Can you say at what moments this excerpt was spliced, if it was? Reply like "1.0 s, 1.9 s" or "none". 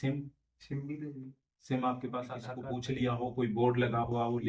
3.0 s